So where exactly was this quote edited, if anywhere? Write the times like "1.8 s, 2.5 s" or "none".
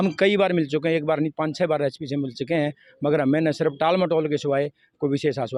none